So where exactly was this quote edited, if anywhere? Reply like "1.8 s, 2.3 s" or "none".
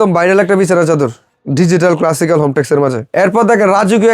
3.0 s